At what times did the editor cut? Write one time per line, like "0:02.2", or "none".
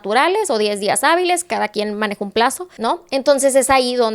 0:02.7